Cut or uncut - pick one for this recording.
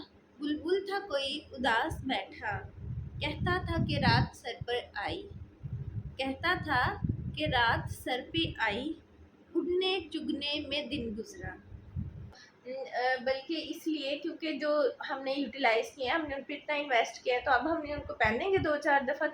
cut